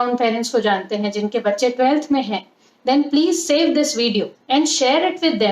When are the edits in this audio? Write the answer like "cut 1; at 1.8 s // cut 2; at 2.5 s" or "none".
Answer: cut 1; at 4.4 s

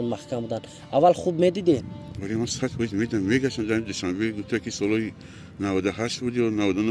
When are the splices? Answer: none

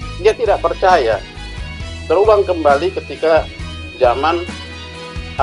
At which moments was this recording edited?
none

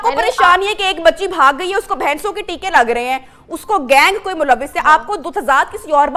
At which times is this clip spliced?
none

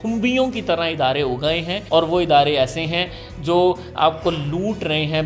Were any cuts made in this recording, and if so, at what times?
cut 1; at 1.7 s

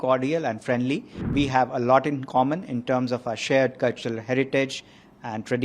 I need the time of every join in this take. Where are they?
cut 1; at 1.3 s

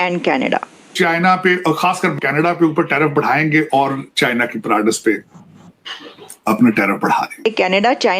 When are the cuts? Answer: cut 1; at 0.9 s // cut 2; at 2.2 s // cut 3; at 7.5 s

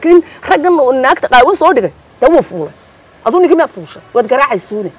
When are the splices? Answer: none

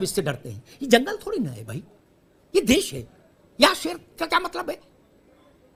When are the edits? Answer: none

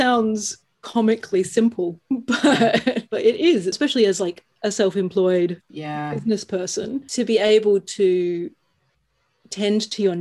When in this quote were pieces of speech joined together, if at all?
none

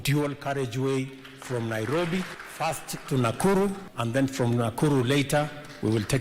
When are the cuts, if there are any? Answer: cut 1; at 2.5 s // cut 2; at 3.9 s

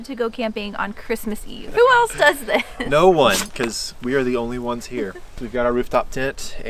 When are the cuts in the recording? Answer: cut 1; at 1.6 s // cut 2; at 5.3 s

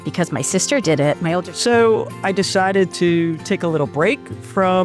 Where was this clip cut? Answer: cut 1; at 1.5 s

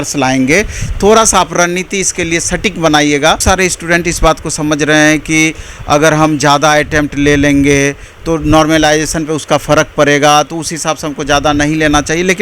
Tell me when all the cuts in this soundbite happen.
cut 1; at 3.4 s

